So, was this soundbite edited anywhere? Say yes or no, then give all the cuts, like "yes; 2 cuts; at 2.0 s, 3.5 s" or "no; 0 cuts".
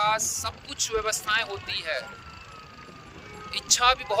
no; 0 cuts